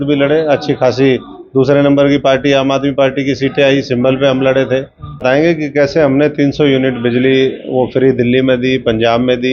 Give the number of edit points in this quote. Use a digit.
1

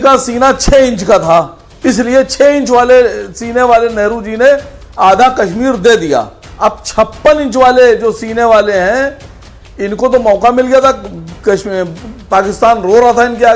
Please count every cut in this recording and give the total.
2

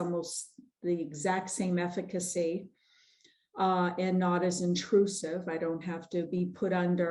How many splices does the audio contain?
0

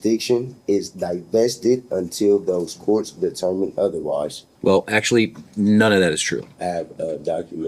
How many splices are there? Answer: 2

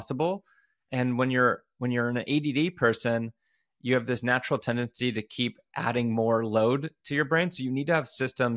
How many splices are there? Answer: 0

